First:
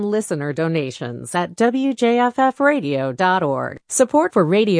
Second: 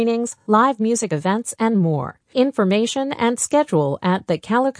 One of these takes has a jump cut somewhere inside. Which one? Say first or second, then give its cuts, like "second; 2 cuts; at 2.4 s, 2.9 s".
first; 1 cut; at 3.8 s